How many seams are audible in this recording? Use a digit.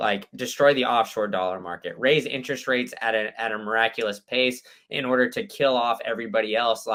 0